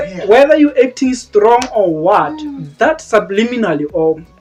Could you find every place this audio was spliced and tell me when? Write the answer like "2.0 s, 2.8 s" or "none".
none